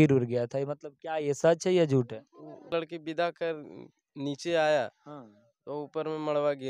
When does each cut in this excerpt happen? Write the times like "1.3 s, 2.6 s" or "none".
2.7 s